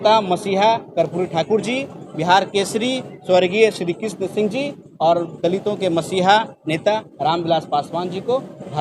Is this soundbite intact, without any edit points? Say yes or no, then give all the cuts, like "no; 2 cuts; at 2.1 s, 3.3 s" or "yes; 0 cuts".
yes; 0 cuts